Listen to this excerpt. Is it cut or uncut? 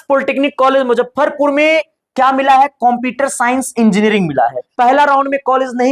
cut